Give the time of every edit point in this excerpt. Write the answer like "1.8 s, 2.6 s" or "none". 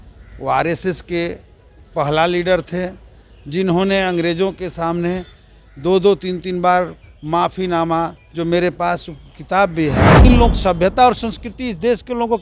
10.2 s